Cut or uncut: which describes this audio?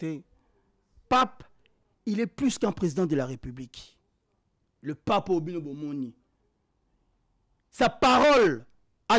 uncut